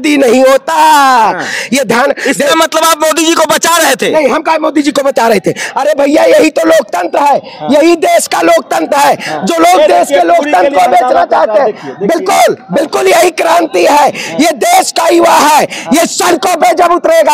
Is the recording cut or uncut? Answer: uncut